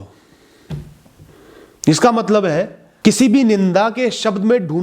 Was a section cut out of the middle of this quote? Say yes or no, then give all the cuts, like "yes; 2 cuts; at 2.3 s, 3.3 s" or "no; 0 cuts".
yes; 1 cut; at 2.8 s